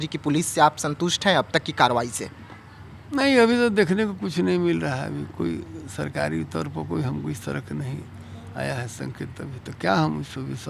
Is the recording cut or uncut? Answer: uncut